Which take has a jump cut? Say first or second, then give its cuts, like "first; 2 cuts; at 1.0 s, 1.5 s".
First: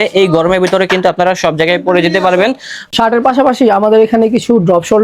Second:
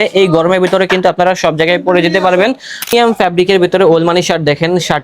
second; 1 cut; at 2.9 s